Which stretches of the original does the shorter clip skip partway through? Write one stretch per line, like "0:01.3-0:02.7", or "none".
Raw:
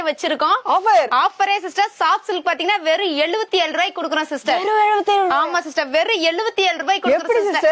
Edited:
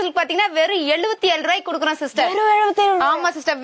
none